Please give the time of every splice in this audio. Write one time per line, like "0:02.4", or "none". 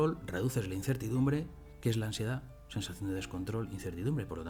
none